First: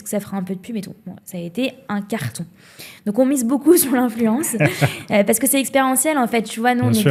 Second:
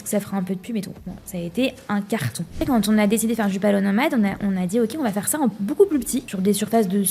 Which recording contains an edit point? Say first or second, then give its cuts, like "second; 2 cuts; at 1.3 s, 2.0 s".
second; 2 cuts; at 2.6 s, 6.3 s